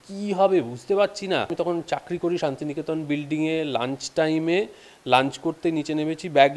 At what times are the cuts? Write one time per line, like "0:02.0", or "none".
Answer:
0:01.5